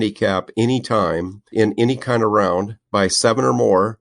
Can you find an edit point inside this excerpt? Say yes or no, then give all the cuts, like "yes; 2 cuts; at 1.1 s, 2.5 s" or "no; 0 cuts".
yes; 2 cuts; at 1.5 s, 2.8 s